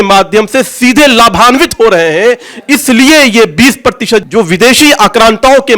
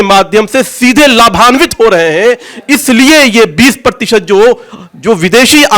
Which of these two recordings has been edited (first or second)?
first